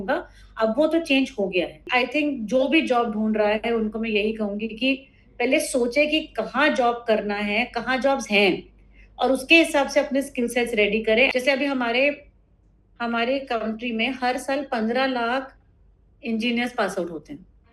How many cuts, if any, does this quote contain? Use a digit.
2